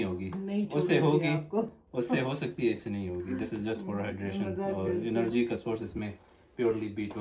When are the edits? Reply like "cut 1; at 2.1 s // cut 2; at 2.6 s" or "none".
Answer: none

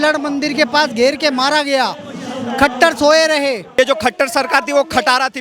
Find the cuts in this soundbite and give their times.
cut 1; at 3.7 s

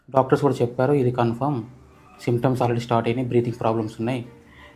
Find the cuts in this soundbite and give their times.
none

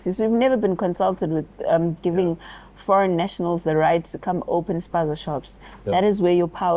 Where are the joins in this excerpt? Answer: none

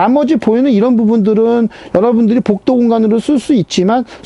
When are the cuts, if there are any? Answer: none

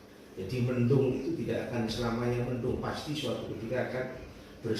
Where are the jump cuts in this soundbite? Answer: none

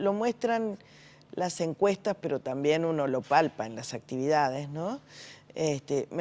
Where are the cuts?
cut 1; at 2.9 s

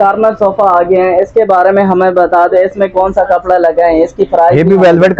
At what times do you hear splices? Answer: none

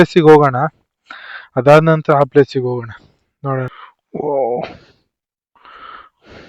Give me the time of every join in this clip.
cut 1; at 3.7 s

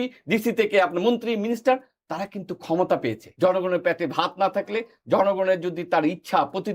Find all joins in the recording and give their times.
cut 1; at 3.2 s

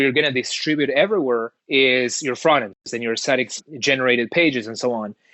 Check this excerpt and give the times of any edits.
cut 1; at 1.6 s // cut 2; at 2.9 s

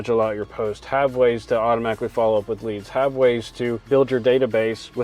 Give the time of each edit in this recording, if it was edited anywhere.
cut 1; at 3.9 s

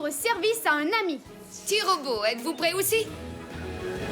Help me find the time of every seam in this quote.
cut 1; at 3.1 s

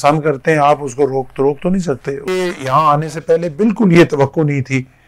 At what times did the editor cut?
cut 1; at 2.3 s

